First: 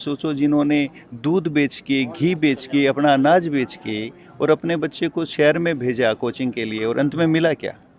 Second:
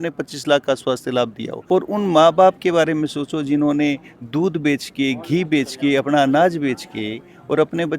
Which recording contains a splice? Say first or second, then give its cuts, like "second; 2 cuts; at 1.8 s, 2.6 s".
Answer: second; 1 cut; at 1.5 s